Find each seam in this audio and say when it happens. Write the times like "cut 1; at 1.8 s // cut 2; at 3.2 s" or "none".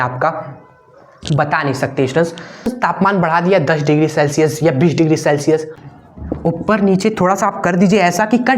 cut 1; at 2.7 s // cut 2; at 5.7 s